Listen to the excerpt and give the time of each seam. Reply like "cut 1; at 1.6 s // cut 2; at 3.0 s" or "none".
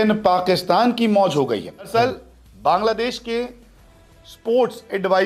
cut 1; at 1.9 s